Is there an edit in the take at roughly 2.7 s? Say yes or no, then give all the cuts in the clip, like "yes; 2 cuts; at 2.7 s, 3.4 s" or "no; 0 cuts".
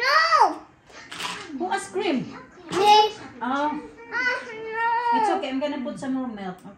no; 0 cuts